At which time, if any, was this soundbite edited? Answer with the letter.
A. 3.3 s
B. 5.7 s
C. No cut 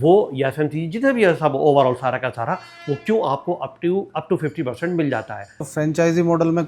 B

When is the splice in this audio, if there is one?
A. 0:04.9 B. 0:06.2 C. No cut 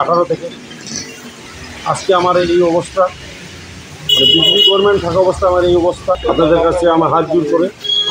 B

